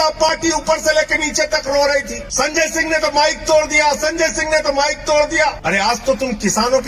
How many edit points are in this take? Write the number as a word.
two